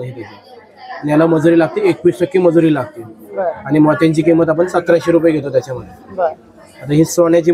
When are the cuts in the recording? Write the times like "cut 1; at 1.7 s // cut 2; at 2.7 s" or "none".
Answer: none